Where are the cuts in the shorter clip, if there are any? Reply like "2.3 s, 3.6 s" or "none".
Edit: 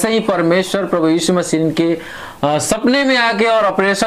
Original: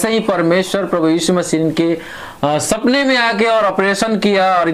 none